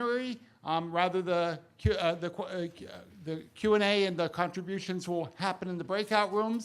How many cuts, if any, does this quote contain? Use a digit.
1